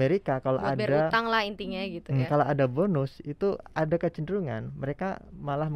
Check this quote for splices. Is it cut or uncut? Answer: uncut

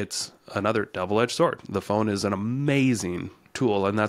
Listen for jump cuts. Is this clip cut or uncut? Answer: uncut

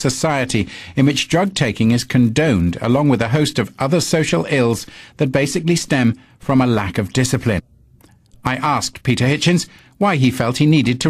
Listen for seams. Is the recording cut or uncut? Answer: cut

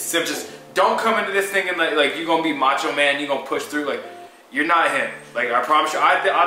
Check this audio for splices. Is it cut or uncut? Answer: uncut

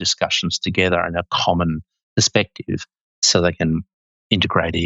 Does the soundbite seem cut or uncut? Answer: cut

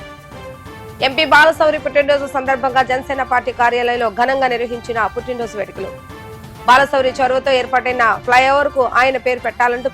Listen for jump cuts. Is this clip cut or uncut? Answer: cut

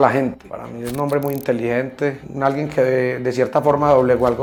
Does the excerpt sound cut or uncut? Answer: uncut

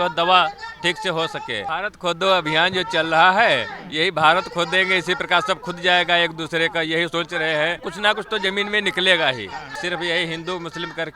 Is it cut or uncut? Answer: cut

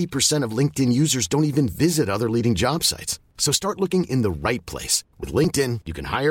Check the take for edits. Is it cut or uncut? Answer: uncut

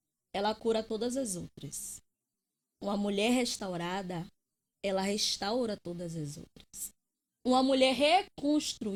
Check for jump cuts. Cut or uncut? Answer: uncut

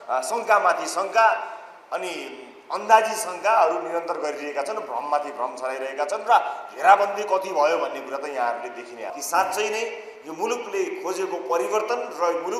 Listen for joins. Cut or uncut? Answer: cut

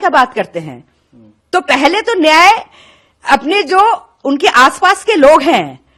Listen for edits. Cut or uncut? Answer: uncut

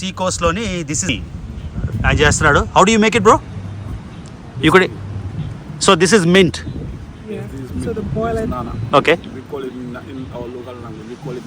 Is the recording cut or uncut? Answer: cut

